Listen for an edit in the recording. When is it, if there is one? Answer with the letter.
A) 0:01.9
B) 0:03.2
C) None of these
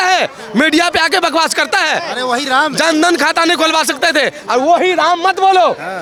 C